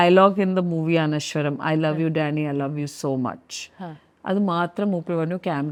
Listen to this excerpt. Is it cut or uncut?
uncut